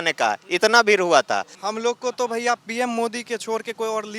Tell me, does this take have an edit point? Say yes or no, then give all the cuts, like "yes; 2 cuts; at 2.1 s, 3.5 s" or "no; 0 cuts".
yes; 1 cut; at 1.5 s